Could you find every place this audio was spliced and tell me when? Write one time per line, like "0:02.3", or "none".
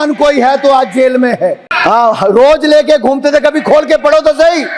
0:01.7